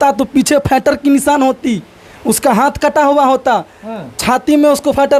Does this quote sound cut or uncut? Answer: uncut